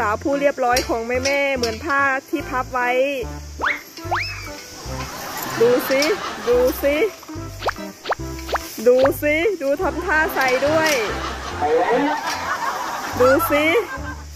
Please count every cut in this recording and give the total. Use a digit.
0